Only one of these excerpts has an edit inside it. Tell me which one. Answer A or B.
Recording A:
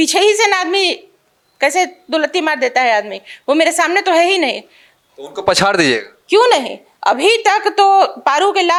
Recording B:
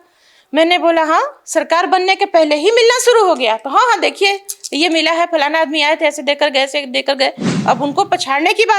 B